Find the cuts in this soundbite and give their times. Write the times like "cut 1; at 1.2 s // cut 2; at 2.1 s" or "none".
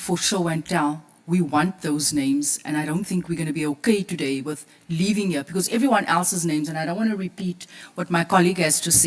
none